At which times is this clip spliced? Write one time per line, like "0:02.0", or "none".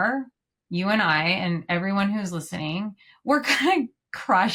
none